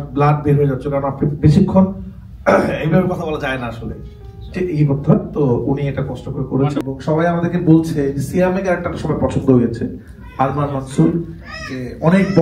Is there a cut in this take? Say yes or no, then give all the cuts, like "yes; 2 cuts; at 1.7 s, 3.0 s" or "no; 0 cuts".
yes; 1 cut; at 6.8 s